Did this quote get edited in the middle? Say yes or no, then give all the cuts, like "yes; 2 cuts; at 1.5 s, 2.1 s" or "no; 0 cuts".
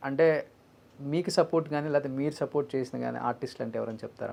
no; 0 cuts